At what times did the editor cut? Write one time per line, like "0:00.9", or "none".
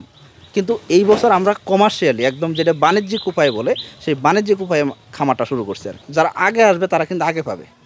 0:06.0